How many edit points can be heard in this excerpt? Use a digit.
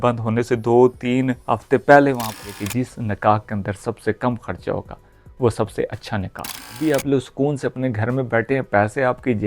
2